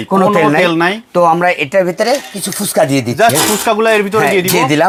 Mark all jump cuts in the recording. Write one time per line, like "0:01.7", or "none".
none

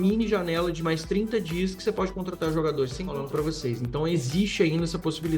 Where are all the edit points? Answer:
0:03.2

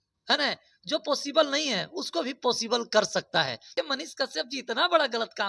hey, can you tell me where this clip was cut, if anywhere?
0:03.7

